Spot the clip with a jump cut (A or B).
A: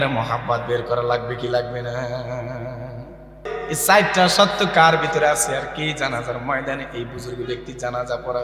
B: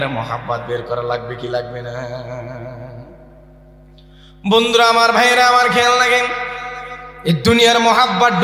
A